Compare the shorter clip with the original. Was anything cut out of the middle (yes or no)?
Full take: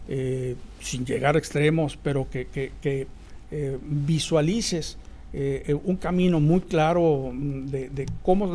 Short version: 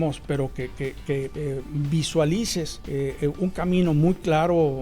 yes